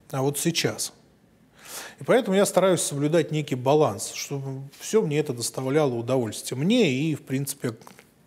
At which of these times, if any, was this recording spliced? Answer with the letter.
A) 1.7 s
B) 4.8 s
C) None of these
C